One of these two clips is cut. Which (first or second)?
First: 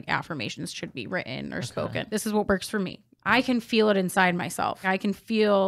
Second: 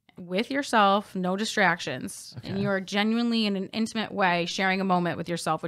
first